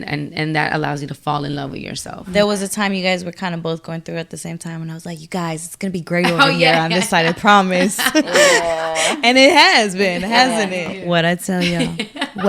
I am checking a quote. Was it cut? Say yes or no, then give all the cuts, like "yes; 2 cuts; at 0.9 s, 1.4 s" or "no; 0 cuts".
yes; 2 cuts; at 2.3 s, 10.9 s